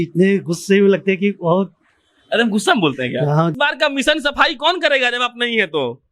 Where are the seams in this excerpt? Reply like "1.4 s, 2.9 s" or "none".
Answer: 3.5 s